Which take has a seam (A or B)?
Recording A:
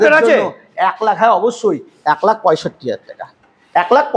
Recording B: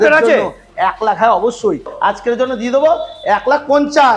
B